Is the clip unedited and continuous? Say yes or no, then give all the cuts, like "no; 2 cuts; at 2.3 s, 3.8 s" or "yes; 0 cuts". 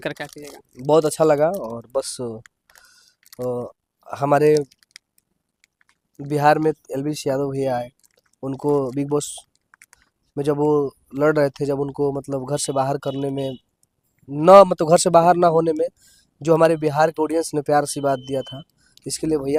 yes; 0 cuts